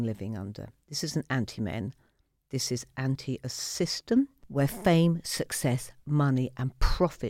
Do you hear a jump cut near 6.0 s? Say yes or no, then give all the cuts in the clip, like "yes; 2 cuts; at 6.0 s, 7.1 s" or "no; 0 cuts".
no; 1 cut; at 4.4 s